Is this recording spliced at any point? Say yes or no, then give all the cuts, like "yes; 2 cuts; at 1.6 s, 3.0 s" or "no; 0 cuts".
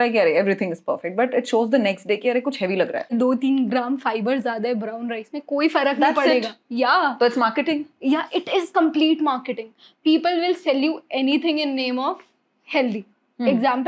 yes; 1 cut; at 3.1 s